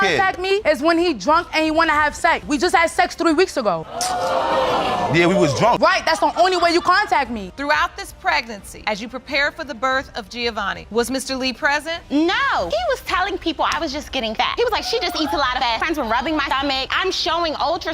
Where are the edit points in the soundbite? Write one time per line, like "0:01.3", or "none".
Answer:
0:02.4
0:07.4